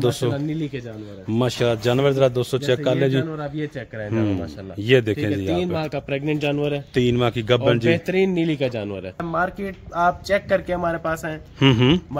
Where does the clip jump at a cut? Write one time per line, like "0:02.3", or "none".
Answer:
0:09.2